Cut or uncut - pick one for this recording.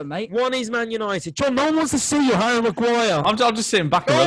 uncut